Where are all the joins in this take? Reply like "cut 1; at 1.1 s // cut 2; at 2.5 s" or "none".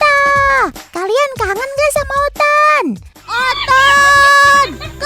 cut 1; at 3.3 s